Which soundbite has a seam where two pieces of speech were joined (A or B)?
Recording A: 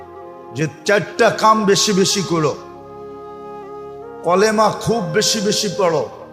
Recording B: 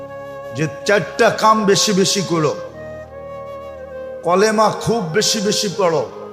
B